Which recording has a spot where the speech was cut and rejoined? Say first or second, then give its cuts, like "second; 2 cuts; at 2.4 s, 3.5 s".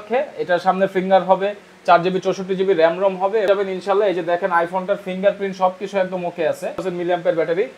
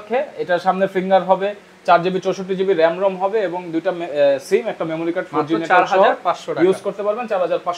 first; 2 cuts; at 3.5 s, 6.8 s